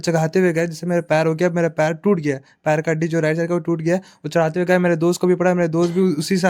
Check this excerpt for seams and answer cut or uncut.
uncut